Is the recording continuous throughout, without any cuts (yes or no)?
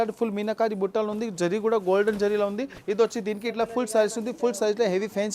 no